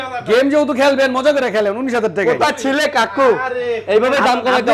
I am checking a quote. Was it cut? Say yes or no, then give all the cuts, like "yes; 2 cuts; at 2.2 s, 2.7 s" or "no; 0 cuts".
no; 0 cuts